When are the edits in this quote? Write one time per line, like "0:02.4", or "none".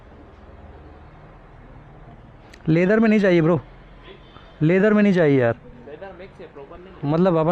none

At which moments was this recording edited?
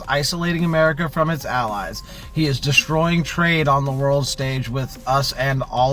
none

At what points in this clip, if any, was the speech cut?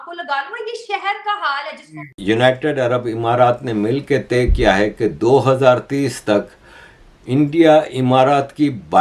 0:02.1

